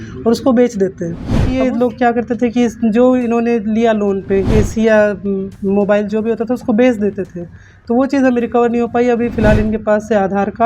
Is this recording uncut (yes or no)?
no